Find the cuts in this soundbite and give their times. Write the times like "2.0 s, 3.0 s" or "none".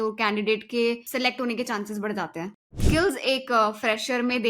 1.0 s, 2.8 s